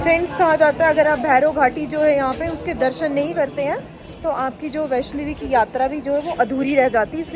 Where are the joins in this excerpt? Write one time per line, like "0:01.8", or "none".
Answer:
none